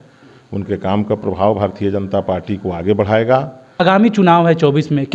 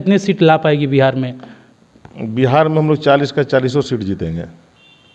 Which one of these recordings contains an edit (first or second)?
first